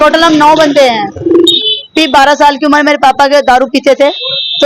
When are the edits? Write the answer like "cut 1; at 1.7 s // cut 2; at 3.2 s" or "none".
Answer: cut 1; at 1.5 s